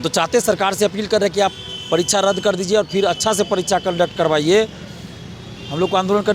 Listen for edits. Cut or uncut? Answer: uncut